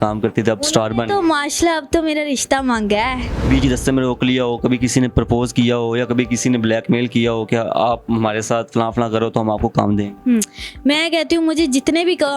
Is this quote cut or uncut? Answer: cut